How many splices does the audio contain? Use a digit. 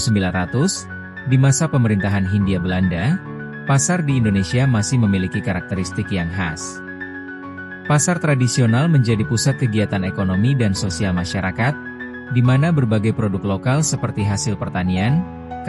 0